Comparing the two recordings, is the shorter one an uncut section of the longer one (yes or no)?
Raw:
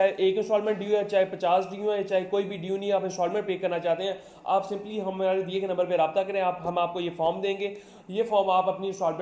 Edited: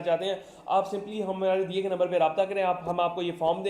yes